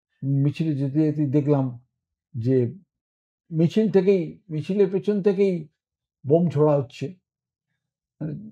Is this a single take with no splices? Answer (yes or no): yes